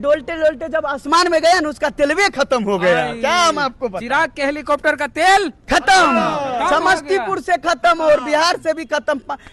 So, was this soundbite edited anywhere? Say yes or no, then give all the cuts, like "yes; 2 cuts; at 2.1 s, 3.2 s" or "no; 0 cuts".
no; 0 cuts